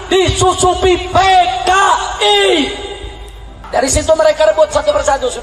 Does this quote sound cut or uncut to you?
cut